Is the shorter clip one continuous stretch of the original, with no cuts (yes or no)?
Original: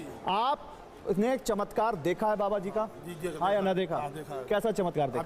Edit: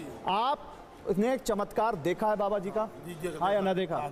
yes